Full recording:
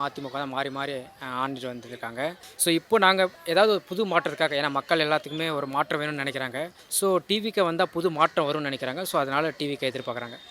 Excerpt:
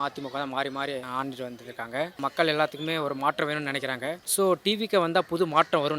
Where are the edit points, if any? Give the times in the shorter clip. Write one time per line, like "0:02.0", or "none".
0:01.1
0:02.2
0:04.2

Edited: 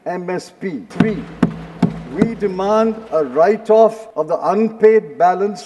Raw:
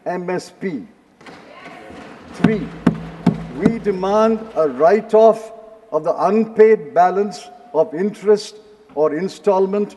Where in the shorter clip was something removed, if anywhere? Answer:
0:00.9
0:04.1

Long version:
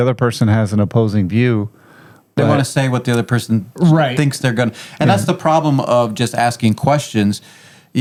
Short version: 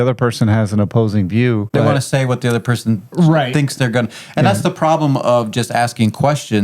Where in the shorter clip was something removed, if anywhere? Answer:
0:01.7

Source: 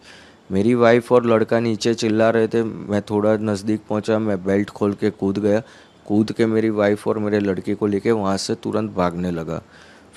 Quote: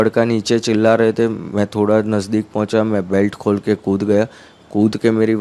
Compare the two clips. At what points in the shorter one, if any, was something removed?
none

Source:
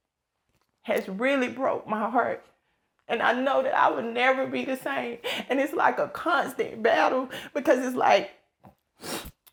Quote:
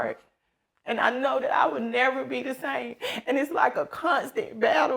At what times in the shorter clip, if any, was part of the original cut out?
none

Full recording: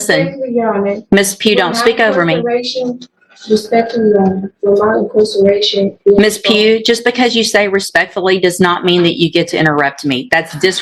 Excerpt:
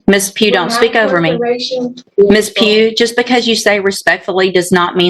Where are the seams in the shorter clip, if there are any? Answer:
0:02.1

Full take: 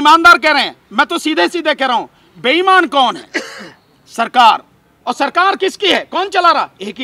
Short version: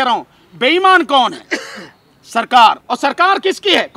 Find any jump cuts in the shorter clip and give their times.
0:02.9

